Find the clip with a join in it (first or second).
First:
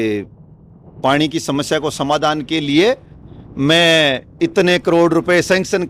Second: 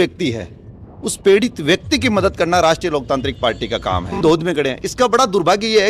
second